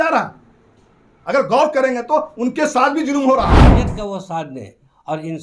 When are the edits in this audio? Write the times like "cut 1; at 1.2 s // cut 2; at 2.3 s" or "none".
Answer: cut 1; at 3.8 s